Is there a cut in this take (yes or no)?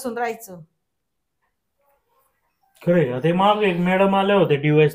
no